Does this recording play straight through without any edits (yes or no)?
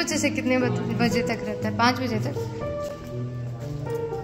yes